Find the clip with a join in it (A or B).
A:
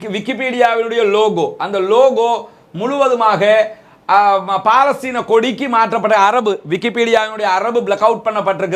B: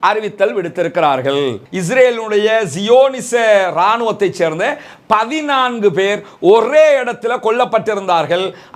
B